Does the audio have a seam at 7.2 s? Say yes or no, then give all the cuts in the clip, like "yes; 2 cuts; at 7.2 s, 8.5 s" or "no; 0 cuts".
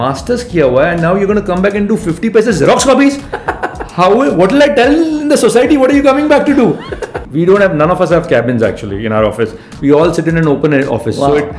yes; 1 cut; at 7.2 s